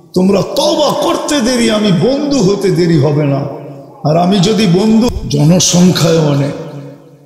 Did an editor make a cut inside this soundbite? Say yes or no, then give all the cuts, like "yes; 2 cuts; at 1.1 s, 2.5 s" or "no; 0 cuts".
yes; 1 cut; at 5.1 s